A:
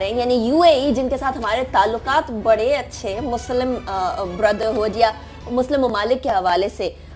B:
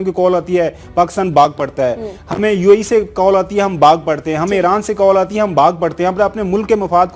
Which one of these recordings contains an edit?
B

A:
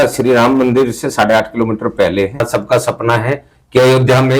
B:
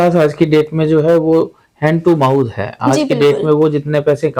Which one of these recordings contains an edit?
A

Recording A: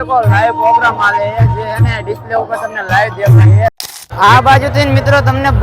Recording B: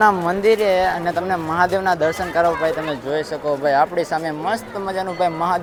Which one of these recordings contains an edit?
A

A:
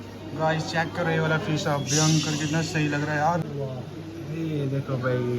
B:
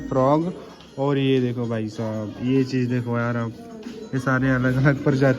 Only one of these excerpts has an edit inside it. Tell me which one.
A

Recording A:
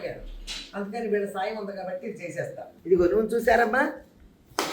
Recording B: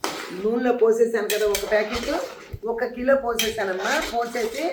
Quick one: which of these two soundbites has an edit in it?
A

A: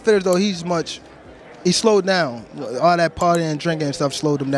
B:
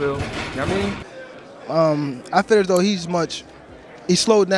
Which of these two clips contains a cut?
B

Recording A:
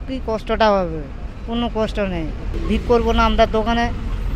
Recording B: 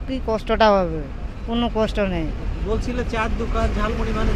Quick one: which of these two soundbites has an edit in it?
A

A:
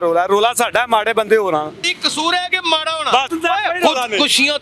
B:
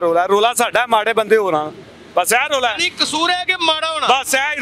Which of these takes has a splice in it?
A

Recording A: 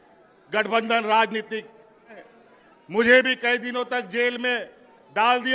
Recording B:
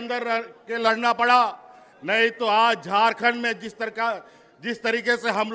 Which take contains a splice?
A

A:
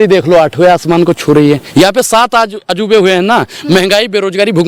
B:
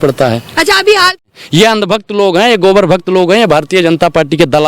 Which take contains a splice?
B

